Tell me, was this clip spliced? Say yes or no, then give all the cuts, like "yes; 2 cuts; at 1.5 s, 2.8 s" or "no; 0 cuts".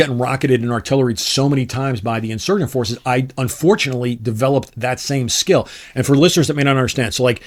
no; 0 cuts